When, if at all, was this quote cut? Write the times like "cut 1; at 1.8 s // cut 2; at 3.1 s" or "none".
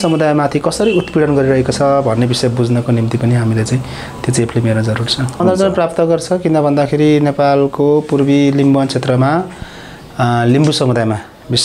cut 1; at 5.4 s